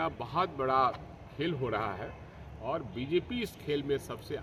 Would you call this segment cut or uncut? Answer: uncut